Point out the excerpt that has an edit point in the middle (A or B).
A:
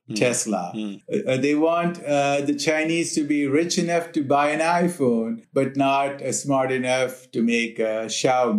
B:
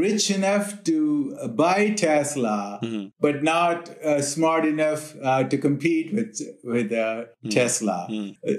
B